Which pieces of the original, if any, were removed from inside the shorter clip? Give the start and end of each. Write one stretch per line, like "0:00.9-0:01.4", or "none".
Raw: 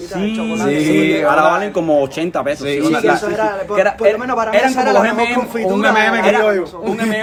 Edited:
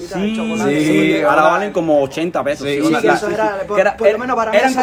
none